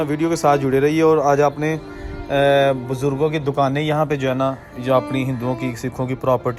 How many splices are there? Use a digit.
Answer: 0